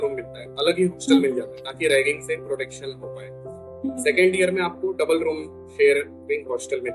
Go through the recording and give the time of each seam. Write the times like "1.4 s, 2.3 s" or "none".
none